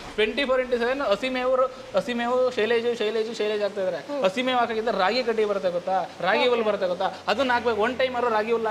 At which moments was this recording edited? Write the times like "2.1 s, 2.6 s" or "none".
none